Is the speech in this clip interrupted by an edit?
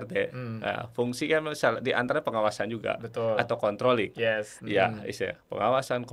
no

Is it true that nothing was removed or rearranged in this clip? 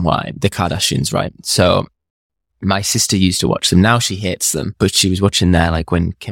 no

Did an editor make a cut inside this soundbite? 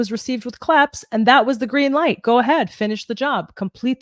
no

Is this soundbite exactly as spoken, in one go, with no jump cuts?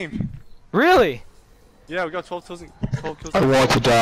yes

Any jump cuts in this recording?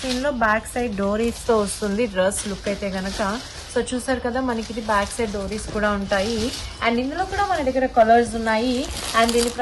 no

